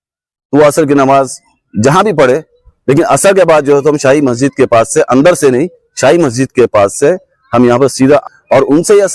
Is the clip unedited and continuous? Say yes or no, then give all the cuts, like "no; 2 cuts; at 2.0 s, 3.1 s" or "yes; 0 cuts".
no; 1 cut; at 8.2 s